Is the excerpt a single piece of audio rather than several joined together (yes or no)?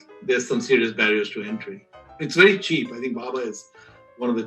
no